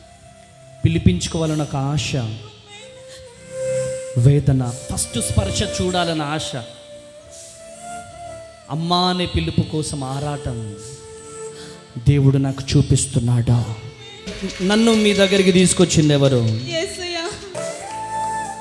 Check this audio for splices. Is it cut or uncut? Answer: cut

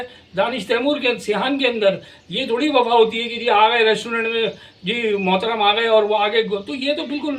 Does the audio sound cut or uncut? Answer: uncut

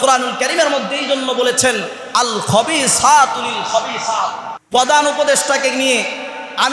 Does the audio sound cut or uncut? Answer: cut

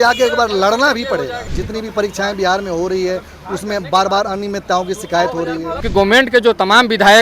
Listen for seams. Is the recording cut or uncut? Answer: cut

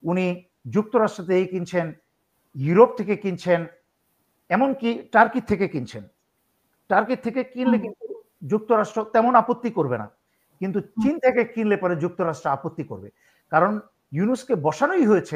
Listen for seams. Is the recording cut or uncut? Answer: uncut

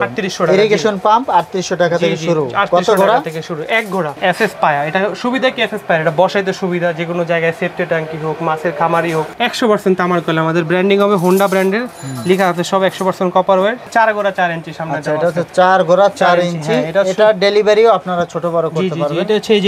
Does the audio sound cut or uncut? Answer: cut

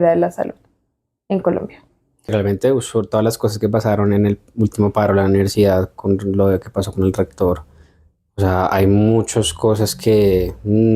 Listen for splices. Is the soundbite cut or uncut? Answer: cut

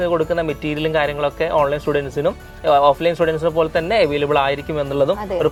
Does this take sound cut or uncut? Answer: uncut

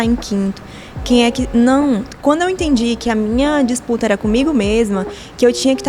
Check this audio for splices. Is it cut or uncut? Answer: cut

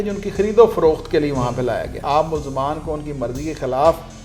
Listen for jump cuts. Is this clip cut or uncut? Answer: cut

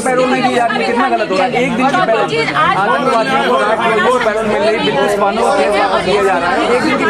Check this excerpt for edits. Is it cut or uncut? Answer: uncut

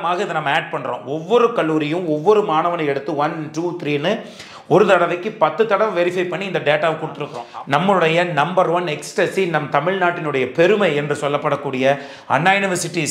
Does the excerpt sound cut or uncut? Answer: cut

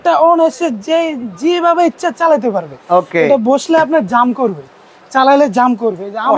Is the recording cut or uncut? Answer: cut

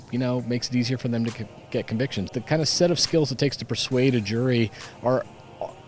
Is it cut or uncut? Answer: cut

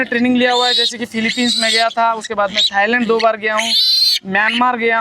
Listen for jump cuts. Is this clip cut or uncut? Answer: uncut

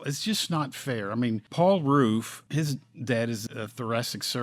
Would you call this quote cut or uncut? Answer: cut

